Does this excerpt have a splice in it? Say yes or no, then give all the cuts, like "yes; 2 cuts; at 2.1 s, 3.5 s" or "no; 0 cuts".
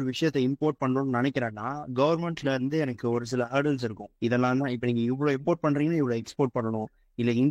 no; 0 cuts